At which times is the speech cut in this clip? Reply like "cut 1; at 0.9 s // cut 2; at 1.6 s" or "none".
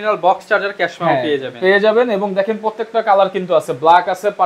none

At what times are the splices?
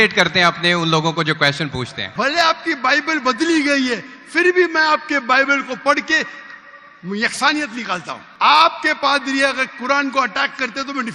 cut 1; at 2.0 s // cut 2; at 8.2 s

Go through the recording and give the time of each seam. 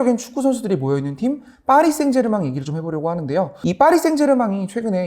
cut 1; at 3.5 s

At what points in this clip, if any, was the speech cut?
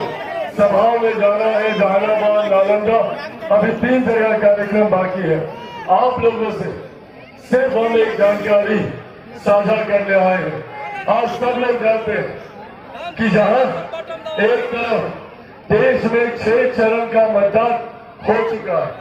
none

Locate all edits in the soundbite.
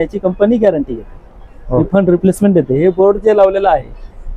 none

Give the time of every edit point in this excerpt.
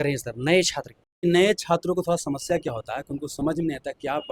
cut 1; at 1.0 s

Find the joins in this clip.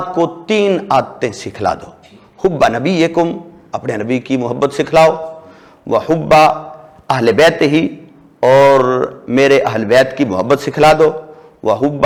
none

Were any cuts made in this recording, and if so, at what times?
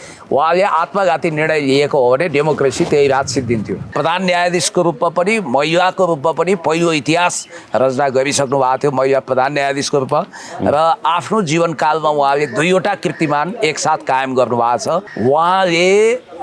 cut 1; at 3.8 s // cut 2; at 15.1 s

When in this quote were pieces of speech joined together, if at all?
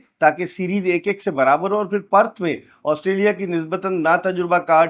none

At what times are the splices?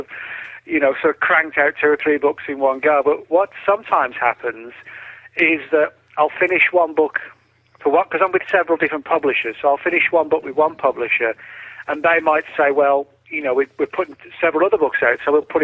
cut 1; at 13.9 s

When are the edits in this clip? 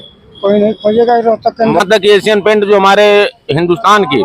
cut 1; at 1.8 s

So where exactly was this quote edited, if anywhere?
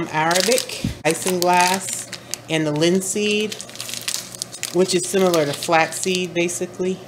cut 1; at 1.1 s

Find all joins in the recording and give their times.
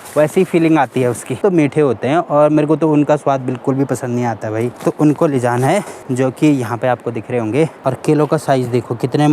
cut 1; at 1.4 s // cut 2; at 4.8 s // cut 3; at 6.0 s // cut 4; at 7.8 s

